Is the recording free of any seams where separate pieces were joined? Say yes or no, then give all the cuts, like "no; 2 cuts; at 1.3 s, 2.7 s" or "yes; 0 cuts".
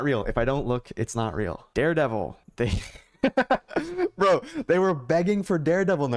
no; 1 cut; at 1.7 s